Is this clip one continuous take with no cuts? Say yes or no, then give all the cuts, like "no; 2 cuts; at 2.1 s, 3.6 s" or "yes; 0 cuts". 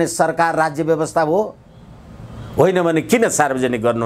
yes; 0 cuts